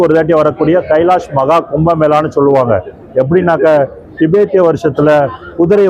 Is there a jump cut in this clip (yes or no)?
no